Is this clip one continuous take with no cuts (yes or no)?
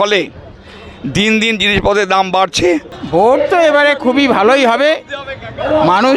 no